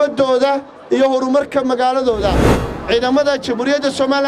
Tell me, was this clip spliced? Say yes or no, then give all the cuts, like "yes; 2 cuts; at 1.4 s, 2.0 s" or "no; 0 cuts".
yes; 1 cut; at 2.6 s